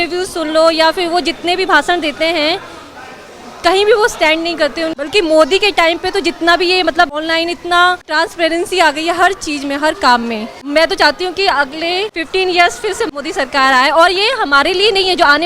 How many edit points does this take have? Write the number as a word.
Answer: six